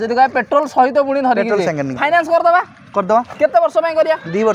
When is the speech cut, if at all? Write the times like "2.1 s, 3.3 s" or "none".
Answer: none